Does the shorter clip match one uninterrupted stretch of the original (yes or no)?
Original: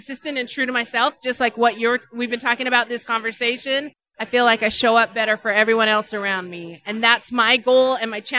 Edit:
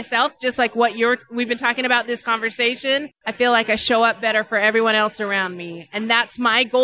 no